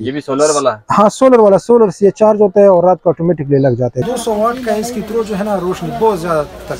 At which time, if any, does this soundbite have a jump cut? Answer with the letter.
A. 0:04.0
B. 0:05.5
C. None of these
A